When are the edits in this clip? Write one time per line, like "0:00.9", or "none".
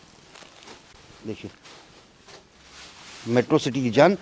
none